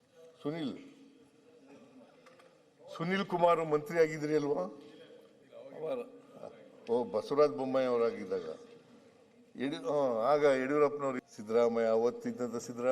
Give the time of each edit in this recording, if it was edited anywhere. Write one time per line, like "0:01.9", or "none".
0:11.2